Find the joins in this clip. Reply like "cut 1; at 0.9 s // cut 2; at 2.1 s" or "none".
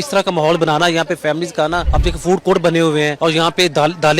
cut 1; at 1.9 s // cut 2; at 3.1 s